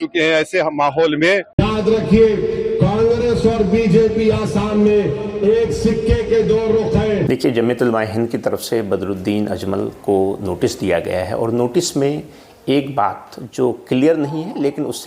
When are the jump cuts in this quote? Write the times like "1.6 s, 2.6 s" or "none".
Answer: 1.5 s, 7.2 s